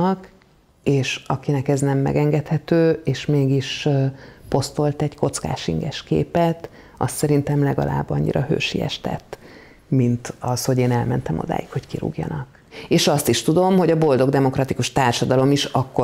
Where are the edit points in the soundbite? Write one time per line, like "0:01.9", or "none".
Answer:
0:12.7